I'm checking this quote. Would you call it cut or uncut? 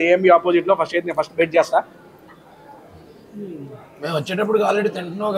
uncut